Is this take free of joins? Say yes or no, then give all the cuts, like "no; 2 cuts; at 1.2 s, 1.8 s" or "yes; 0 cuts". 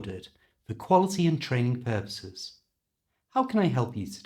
yes; 0 cuts